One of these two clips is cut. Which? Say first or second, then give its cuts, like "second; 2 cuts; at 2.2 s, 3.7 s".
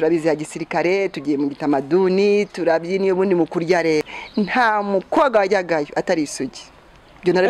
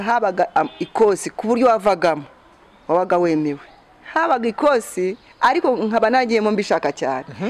first; 1 cut; at 4.1 s